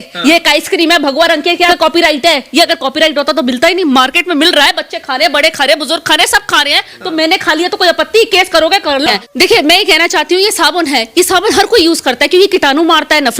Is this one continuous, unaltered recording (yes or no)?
no